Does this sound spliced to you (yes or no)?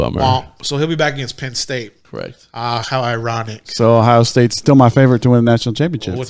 yes